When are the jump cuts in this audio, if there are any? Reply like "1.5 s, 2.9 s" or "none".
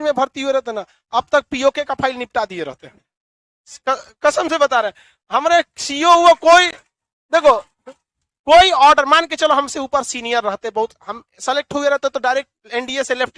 none